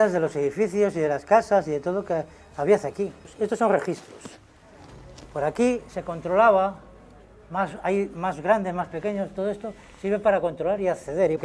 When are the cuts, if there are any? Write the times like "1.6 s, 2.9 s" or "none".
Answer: none